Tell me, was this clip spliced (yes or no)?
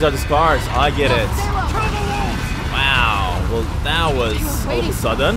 no